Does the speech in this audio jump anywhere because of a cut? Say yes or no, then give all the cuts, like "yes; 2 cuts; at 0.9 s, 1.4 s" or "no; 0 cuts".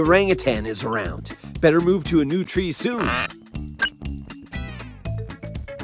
no; 0 cuts